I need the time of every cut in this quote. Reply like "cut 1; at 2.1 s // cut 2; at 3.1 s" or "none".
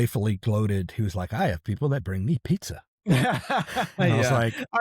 none